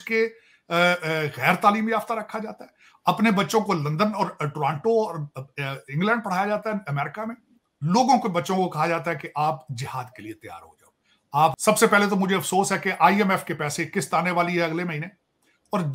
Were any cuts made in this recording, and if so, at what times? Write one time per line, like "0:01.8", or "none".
0:11.6